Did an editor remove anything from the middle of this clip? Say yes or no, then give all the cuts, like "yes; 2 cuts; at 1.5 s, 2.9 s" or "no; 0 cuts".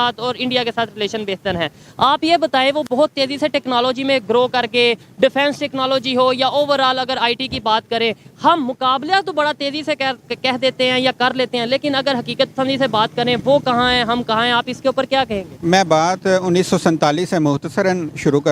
no; 0 cuts